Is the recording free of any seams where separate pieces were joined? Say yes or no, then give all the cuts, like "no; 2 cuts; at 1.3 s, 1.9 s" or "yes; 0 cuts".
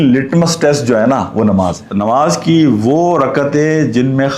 no; 1 cut; at 1.9 s